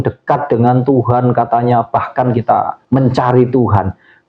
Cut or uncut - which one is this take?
cut